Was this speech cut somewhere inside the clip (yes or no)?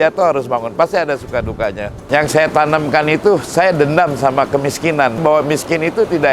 yes